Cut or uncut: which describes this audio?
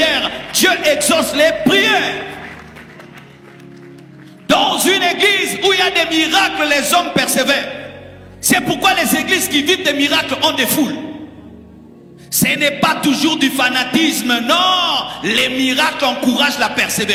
uncut